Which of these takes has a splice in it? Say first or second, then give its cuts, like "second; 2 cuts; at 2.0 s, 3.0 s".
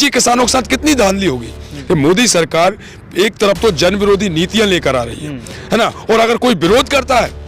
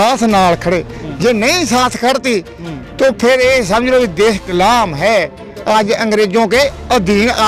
first; 1 cut; at 1.7 s